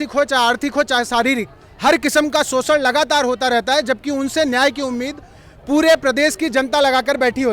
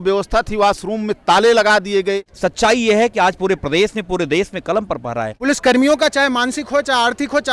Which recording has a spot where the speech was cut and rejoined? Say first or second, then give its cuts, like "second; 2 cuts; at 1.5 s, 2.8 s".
second; 2 cuts; at 2.3 s, 5.3 s